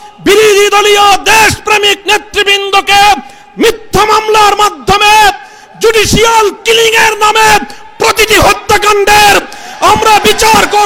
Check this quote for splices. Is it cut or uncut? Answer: uncut